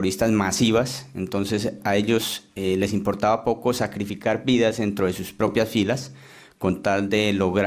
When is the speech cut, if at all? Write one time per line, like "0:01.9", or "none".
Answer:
0:05.9